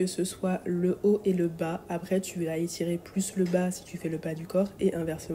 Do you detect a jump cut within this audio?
no; 0 cuts

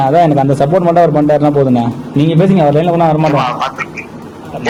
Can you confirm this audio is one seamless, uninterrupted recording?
yes; 0 cuts

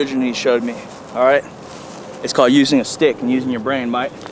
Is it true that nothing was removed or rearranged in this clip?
yes; 0 cuts

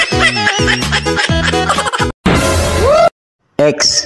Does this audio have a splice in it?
no; 0 cuts

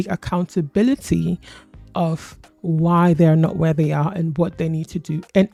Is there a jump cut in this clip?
no; 0 cuts

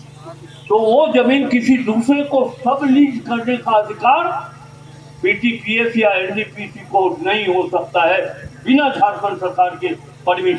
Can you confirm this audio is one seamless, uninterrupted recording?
yes; 0 cuts

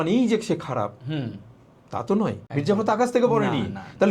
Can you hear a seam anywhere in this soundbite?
yes; 1 cut; at 2.4 s

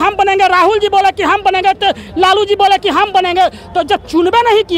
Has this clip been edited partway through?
no; 0 cuts

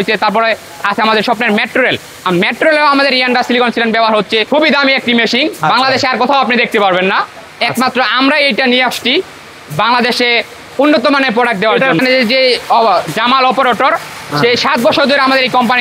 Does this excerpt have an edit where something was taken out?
yes; 2 cuts; at 4.5 s, 12.0 s

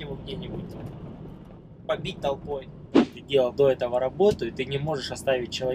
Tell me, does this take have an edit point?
yes; 1 cut; at 3.2 s

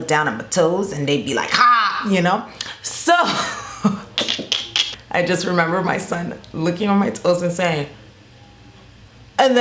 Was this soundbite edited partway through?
yes; 1 cut; at 5.0 s

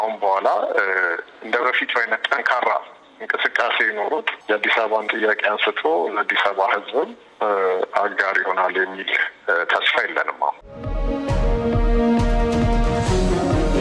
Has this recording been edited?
yes; 1 cut; at 10.9 s

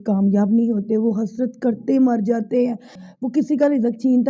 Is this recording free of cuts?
no; 1 cut; at 3.0 s

